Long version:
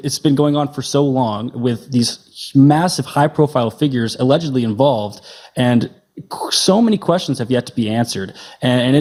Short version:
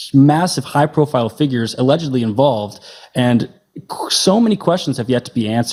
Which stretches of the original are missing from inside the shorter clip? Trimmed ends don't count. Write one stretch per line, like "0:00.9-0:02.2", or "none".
none